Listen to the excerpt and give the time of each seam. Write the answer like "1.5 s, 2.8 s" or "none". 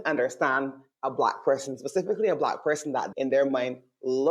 3.1 s

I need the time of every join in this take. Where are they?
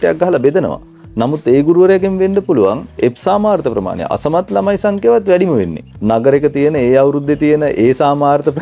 5.9 s

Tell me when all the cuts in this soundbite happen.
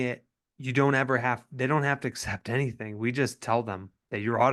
none

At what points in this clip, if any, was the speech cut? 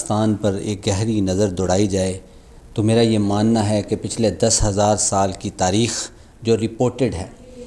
none

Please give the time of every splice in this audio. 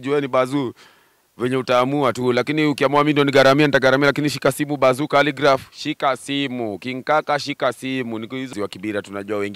8.5 s

